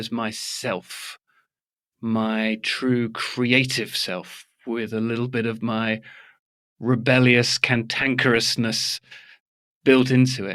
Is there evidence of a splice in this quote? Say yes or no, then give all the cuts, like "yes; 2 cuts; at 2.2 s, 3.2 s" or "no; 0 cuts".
no; 0 cuts